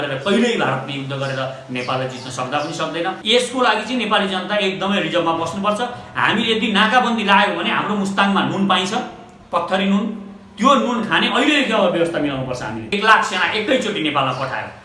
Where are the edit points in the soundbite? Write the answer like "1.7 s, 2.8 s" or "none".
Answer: 3.2 s, 12.9 s